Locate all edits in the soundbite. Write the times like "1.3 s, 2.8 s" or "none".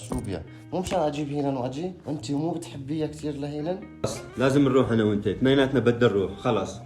4.2 s